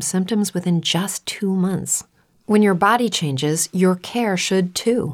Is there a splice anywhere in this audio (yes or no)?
yes